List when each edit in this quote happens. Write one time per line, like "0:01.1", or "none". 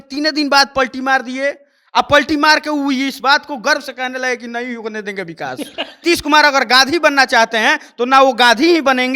0:06.0